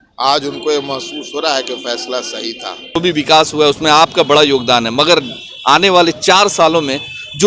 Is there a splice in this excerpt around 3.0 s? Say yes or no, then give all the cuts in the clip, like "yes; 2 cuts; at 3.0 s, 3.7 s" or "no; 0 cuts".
yes; 1 cut; at 3.0 s